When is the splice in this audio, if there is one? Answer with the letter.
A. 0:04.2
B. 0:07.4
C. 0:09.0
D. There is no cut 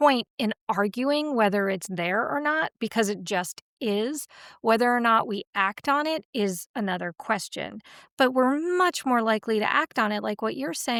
D